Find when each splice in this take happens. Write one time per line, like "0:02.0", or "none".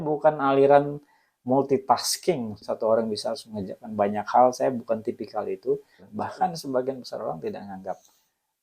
0:02.6
0:06.1